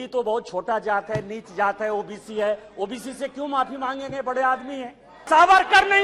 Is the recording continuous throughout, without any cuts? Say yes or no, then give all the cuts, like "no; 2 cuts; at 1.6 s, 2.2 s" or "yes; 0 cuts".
no; 1 cut; at 5.1 s